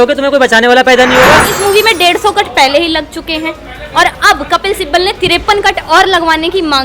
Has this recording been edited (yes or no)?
yes